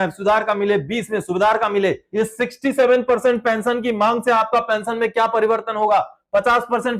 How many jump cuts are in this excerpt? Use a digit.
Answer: 1